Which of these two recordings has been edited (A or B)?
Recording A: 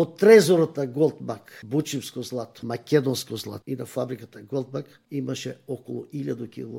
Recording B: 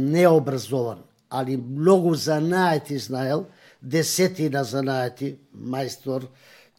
A